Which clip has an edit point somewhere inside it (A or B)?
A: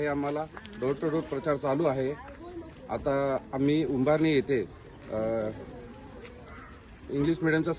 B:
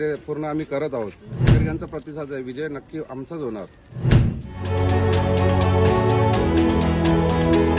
B